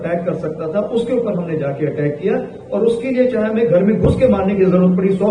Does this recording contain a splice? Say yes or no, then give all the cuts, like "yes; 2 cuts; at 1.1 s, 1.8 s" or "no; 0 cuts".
no; 0 cuts